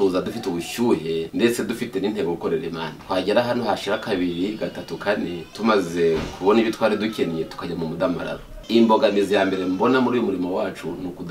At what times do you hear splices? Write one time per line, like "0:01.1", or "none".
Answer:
0:01.3
0:02.9
0:05.5
0:08.5

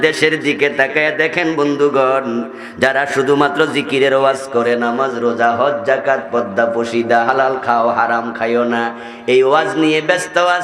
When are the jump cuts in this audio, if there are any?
none

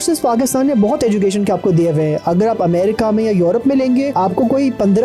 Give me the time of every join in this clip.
0:04.1

